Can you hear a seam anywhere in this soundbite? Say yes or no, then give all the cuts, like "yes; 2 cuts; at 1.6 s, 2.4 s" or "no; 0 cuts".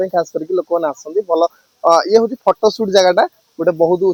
no; 0 cuts